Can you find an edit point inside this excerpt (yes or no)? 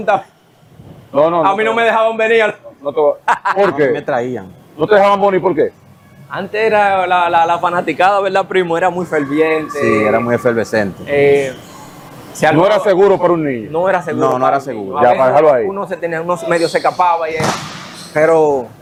no